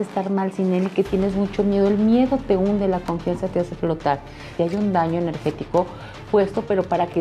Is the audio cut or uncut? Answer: cut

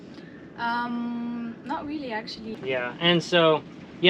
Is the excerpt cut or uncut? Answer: cut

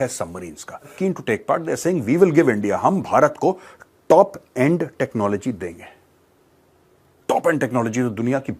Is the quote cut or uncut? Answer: cut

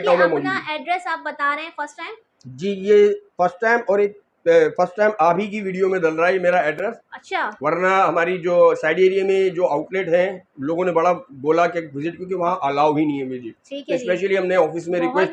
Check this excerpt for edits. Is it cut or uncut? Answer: uncut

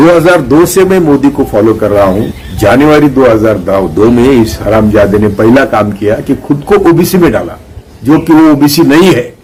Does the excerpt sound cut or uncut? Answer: uncut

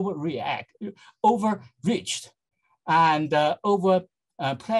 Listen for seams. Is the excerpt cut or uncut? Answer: uncut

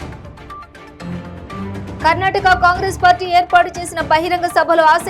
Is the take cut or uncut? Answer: cut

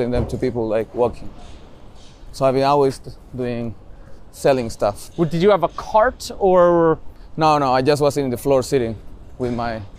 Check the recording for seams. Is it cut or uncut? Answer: uncut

